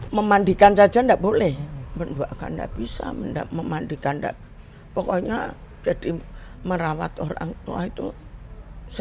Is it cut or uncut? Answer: cut